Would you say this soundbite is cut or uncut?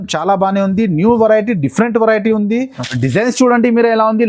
cut